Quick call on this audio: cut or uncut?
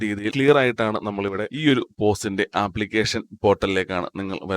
cut